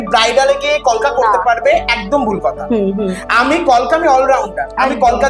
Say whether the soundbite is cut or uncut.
uncut